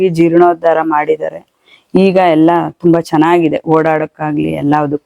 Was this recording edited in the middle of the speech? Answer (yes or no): no